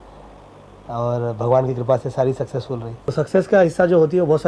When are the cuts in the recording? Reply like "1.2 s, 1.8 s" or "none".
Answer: 3.1 s